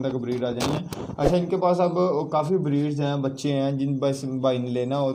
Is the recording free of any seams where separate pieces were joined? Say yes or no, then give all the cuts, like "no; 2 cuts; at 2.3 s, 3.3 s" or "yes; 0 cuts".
yes; 0 cuts